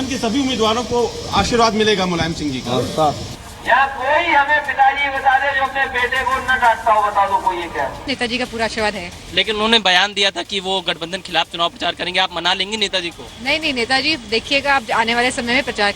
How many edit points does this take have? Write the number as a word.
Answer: two